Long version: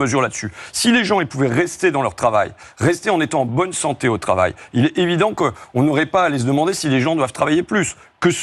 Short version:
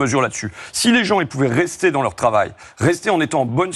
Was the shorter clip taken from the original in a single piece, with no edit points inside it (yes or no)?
yes